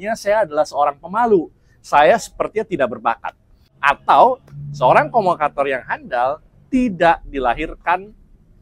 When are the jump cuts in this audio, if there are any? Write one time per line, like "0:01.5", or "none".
0:03.7

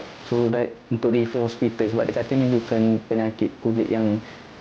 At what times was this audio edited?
none

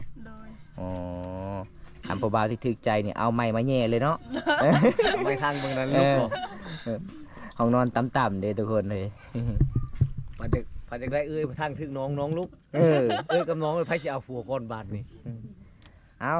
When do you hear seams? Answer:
none

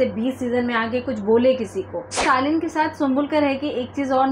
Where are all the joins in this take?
0:02.2

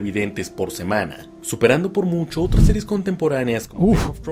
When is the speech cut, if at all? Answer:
none

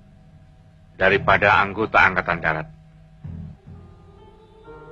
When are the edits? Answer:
0:03.6

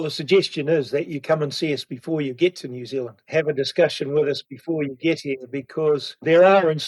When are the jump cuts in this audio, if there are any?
0:03.2

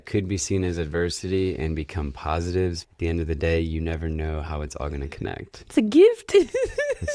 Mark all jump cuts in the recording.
0:02.8

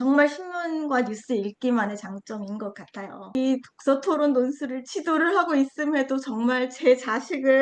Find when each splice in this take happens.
0:03.4

